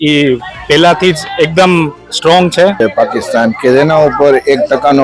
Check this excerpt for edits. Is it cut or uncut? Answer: cut